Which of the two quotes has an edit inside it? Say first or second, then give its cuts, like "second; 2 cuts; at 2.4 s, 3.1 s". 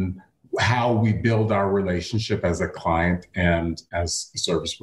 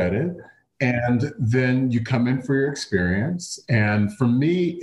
first; 1 cut; at 3.8 s